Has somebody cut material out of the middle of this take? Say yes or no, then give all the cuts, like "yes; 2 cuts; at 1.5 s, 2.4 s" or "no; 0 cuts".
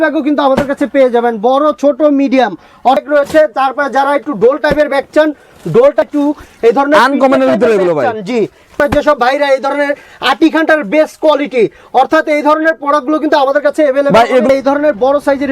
yes; 4 cuts; at 3.0 s, 6.0 s, 8.7 s, 14.5 s